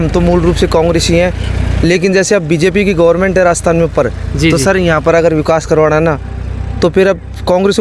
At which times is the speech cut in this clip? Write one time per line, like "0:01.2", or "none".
none